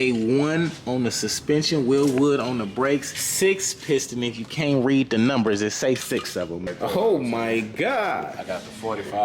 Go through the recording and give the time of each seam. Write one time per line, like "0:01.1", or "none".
0:03.2
0:06.6